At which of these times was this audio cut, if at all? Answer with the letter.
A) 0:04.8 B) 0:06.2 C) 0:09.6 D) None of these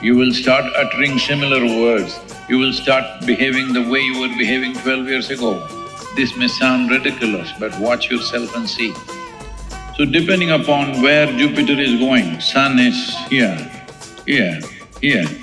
C